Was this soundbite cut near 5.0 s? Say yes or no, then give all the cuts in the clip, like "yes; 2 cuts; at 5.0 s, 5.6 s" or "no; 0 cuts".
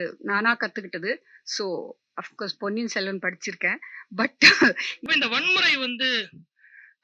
yes; 1 cut; at 5.0 s